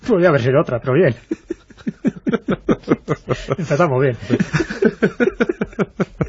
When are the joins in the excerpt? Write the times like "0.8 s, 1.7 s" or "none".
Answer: 1.2 s

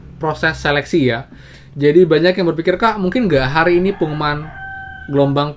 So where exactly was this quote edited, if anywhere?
none

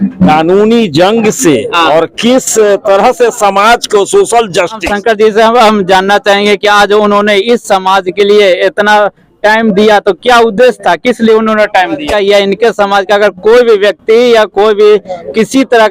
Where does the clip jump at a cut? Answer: 4.9 s, 12.0 s

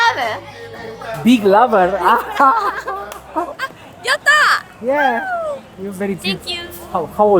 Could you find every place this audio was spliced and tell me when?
3.6 s

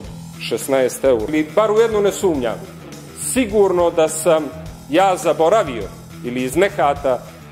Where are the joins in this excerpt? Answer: 1.3 s

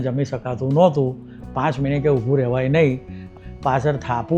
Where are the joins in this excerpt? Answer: 3.3 s

